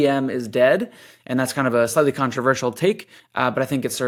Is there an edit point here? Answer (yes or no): no